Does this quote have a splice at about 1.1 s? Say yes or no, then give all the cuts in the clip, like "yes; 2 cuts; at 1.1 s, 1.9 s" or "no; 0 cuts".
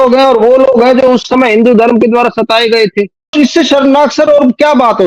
no; 1 cut; at 3.3 s